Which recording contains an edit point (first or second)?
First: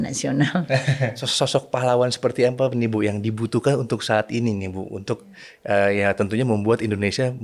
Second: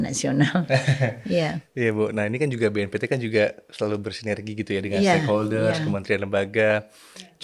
first